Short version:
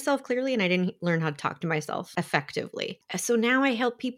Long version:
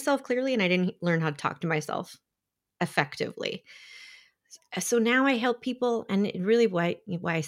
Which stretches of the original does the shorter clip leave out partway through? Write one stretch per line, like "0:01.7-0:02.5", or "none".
0:02.1-0:02.7
0:03.6-0:04.6